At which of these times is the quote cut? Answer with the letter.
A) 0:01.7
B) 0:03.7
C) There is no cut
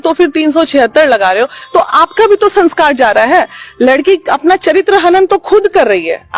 C